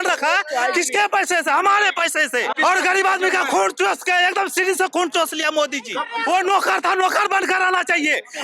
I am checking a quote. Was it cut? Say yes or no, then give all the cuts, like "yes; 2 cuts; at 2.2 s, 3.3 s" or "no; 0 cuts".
yes; 2 cuts; at 2.5 s, 6.1 s